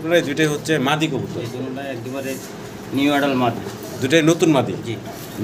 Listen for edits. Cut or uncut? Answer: uncut